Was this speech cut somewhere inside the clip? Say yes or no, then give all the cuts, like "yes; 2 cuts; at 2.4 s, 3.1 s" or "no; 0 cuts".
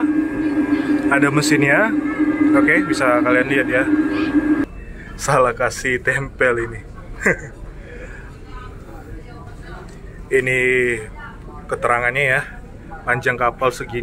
yes; 1 cut; at 4.7 s